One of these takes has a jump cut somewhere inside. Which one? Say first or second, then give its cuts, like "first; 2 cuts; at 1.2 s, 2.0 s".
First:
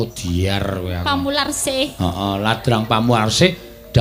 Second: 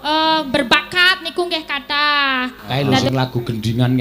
second; 1 cut; at 3.1 s